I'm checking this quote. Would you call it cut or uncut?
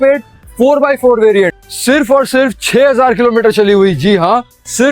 cut